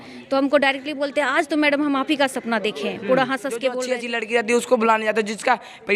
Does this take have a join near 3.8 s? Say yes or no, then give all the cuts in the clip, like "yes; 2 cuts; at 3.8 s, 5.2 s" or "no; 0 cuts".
yes; 1 cut; at 3.8 s